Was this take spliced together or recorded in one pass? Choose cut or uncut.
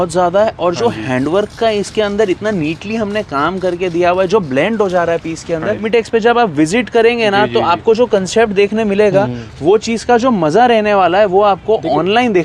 cut